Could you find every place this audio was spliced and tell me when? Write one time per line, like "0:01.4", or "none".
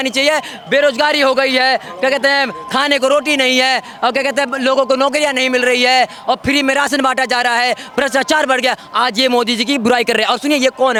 none